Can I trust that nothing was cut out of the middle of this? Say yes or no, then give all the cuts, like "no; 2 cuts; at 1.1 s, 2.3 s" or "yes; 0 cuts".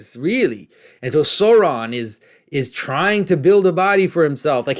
yes; 0 cuts